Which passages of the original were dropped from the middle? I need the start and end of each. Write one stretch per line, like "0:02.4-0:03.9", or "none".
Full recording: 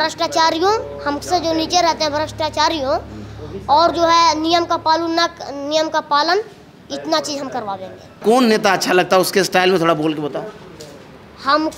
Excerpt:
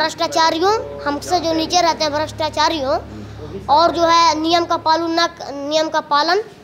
none